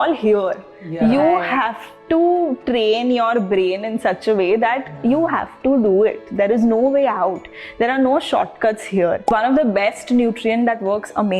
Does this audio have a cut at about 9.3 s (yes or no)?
yes